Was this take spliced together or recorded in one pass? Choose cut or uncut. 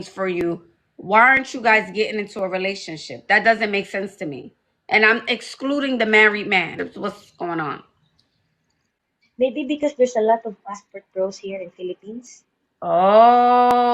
cut